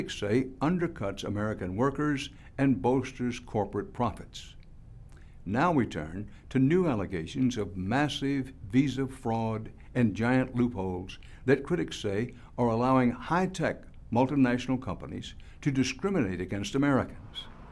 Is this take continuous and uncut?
yes; 0 cuts

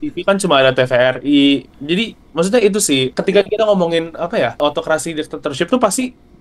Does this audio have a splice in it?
yes; 2 cuts; at 3.1 s, 4.6 s

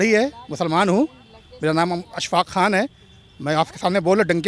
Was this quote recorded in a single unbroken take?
yes; 0 cuts

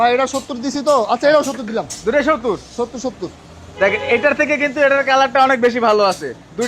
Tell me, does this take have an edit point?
no; 0 cuts

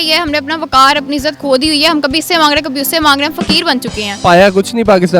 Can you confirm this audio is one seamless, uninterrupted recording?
no; 1 cut; at 4.1 s

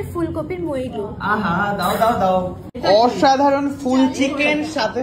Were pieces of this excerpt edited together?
yes; 1 cut; at 2.7 s

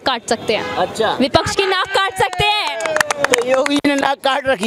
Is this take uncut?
yes; 0 cuts

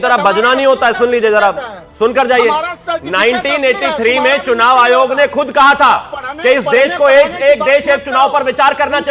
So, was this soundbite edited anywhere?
no; 0 cuts

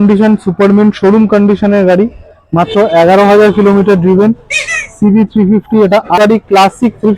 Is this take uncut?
no; 1 cut; at 6.2 s

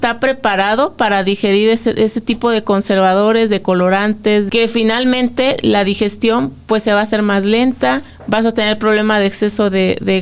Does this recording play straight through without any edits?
no; 2 cuts; at 4.5 s, 8.1 s

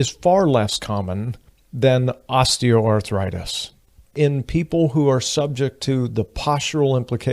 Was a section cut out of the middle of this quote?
yes; 1 cut; at 4.1 s

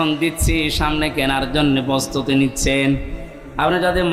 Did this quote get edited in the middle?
no; 0 cuts

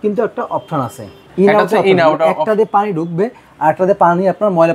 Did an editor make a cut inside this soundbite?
yes; 1 cut; at 1.2 s

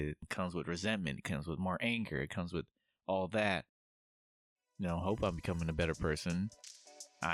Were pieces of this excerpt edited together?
no; 0 cuts

